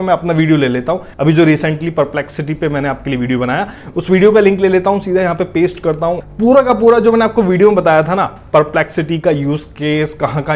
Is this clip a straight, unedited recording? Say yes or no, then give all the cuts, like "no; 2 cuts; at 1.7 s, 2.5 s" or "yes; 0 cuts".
no; 2 cuts; at 1.1 s, 6.2 s